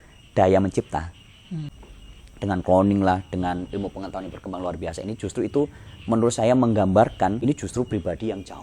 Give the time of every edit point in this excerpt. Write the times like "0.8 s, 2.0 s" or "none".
1.8 s, 7.4 s

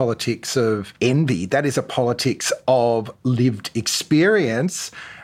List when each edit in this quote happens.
none

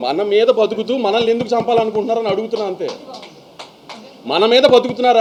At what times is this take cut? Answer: none

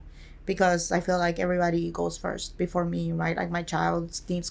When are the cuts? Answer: none

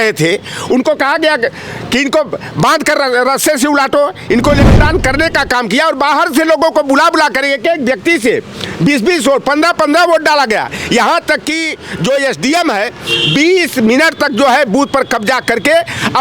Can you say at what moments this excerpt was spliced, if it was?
4.7 s

